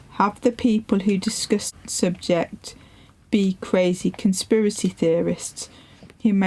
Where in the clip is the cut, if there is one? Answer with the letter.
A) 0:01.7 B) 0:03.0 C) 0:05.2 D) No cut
A